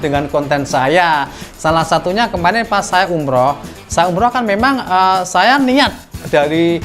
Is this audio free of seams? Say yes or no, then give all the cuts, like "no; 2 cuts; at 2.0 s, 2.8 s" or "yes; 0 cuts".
no; 1 cut; at 1.4 s